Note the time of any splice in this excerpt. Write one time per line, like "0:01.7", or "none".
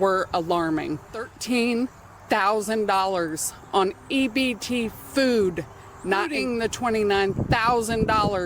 0:01.4
0:06.3